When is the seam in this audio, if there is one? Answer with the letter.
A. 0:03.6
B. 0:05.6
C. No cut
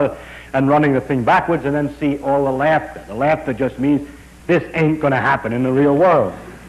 C